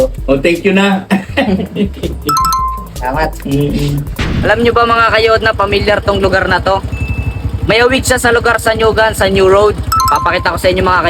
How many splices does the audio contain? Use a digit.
1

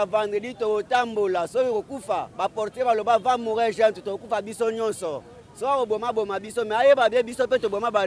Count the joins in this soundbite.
0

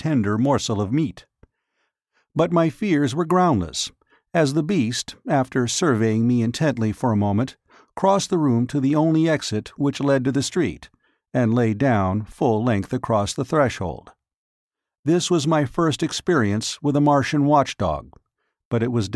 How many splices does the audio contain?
1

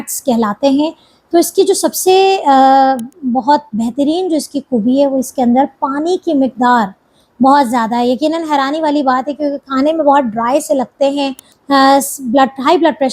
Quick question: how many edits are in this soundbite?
1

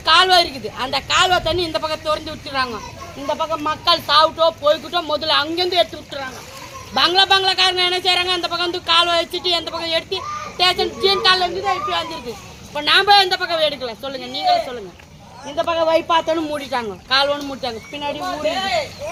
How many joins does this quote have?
0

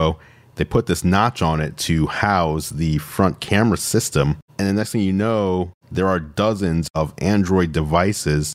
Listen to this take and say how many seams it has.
2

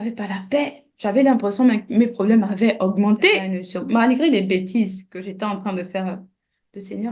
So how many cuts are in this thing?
1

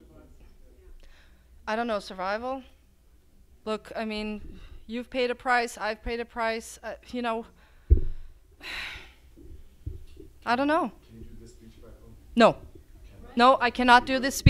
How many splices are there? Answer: 0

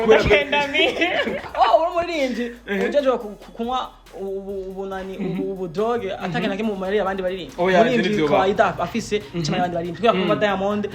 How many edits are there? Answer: 1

